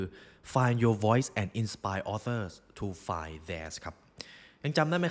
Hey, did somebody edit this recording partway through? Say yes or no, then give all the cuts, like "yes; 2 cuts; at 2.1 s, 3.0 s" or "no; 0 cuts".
no; 0 cuts